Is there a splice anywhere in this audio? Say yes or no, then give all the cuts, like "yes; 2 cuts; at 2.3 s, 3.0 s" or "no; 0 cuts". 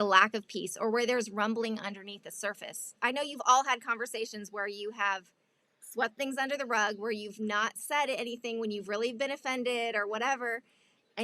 yes; 1 cut; at 2.9 s